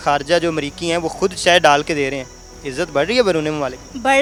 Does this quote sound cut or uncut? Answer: uncut